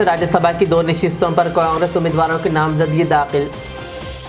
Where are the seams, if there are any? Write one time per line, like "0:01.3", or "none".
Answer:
none